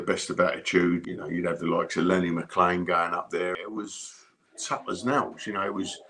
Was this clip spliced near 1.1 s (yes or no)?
yes